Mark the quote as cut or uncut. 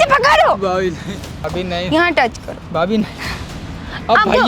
cut